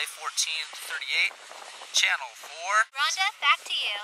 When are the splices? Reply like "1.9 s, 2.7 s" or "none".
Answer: 2.9 s